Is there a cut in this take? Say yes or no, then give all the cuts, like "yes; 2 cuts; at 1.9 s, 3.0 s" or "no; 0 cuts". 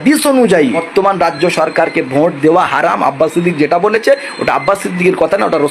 no; 0 cuts